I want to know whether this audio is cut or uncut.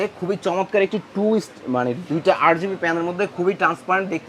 uncut